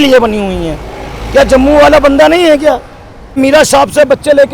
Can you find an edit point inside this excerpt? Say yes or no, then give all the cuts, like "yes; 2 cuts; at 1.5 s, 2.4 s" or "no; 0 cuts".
yes; 1 cut; at 3.4 s